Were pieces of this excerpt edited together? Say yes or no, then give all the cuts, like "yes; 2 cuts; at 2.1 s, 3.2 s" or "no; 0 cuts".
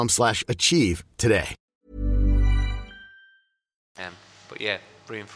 no; 0 cuts